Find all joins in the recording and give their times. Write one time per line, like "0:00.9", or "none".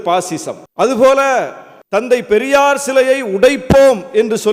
none